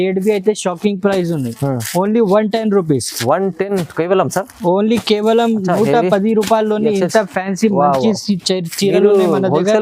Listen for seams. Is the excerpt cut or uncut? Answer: uncut